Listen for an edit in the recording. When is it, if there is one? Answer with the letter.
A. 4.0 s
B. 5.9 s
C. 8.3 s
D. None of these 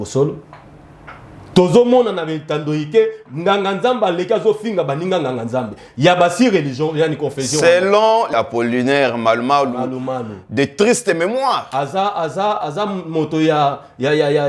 C